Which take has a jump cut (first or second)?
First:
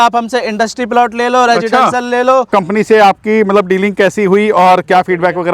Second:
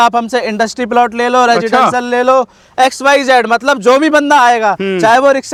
first